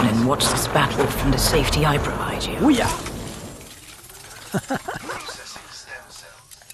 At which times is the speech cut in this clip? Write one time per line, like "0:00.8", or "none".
0:02.5